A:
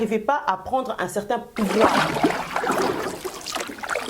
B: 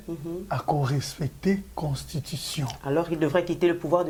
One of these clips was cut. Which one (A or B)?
A